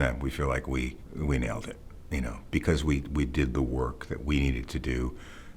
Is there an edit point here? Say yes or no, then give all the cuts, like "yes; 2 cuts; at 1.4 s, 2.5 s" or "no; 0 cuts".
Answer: yes; 1 cut; at 1.0 s